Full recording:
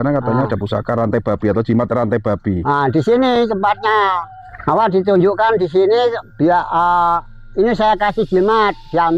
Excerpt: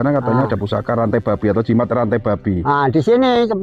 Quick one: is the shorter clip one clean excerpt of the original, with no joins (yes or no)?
yes